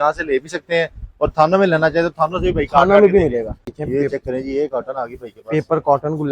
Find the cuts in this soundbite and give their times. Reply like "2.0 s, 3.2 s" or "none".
3.8 s